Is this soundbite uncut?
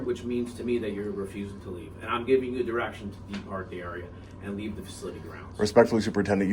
yes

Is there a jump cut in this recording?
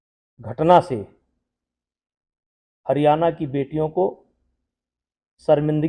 no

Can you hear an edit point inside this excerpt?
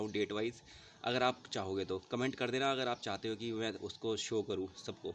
no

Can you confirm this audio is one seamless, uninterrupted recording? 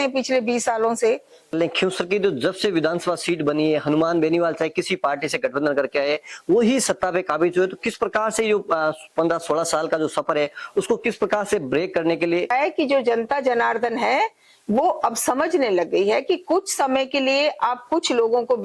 no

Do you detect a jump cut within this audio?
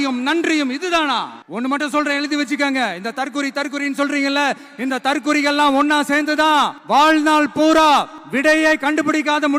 yes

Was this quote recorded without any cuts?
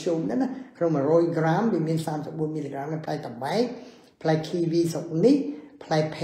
yes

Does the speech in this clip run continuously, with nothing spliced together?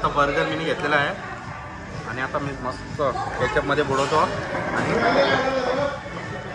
yes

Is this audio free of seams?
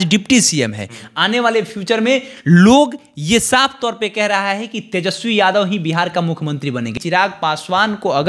no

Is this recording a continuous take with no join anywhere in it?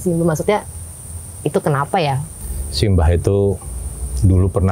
no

